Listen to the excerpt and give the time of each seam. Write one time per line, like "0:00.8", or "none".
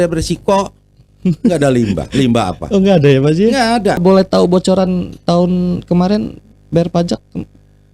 0:04.0

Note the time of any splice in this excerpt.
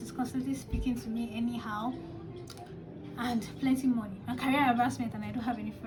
none

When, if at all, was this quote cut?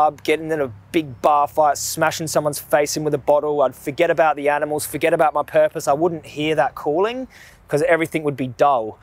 none

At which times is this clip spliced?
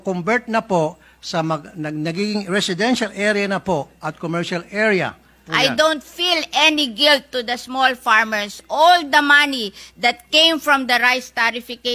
0:05.4

